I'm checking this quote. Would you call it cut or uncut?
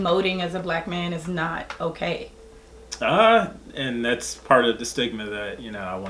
uncut